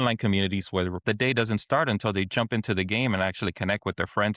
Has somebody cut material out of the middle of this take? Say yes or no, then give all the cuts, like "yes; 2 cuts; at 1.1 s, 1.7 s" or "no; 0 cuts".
yes; 1 cut; at 1.0 s